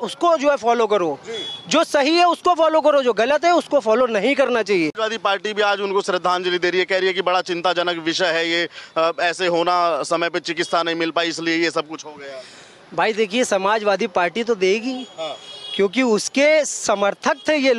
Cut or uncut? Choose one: uncut